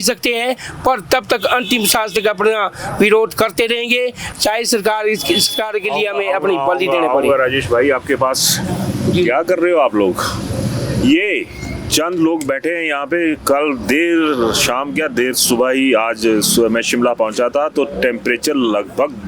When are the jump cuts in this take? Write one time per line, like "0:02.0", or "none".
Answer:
none

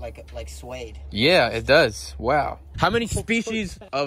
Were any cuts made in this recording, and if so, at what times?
0:02.7

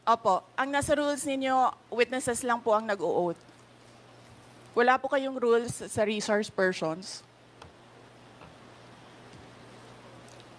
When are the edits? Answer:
none

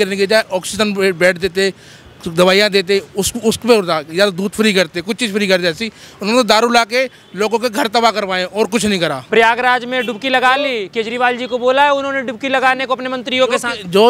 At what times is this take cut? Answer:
0:09.2

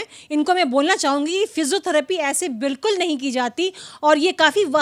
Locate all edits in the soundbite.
none

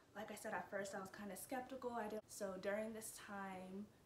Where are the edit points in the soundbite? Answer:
0:02.2

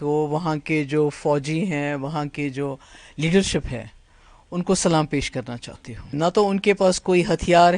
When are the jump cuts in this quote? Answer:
0:06.2

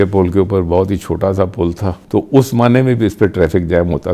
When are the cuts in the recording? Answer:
0:01.9

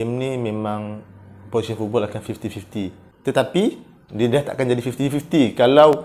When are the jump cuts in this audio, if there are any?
0:03.0

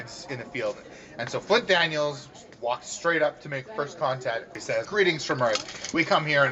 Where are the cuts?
0:04.8

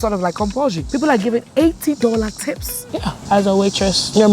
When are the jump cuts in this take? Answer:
0:02.9

